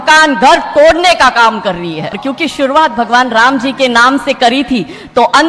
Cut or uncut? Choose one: cut